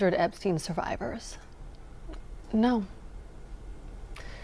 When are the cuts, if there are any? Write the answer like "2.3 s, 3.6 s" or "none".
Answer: none